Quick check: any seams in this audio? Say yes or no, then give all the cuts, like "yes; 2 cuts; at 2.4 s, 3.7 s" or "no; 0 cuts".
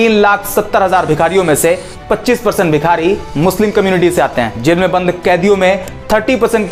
no; 0 cuts